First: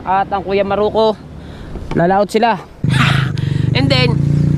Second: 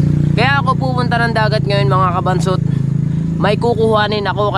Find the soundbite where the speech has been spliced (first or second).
first